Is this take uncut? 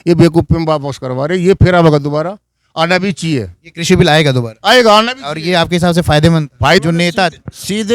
no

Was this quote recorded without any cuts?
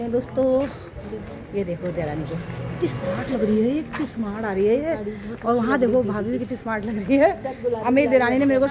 yes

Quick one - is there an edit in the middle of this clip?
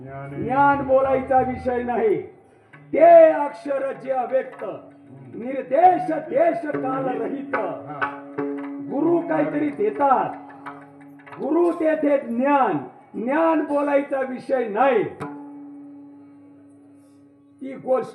no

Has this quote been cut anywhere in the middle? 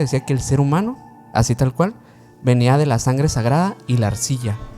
no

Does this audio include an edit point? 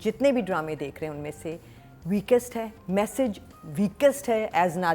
no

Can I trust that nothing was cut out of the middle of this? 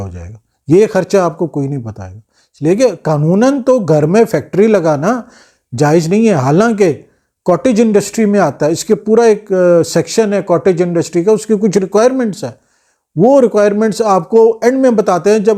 yes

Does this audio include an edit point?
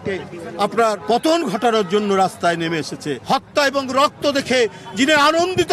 yes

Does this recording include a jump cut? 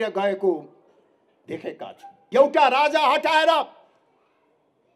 yes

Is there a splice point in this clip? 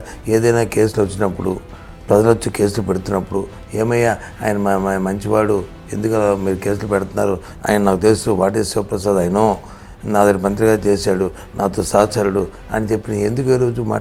no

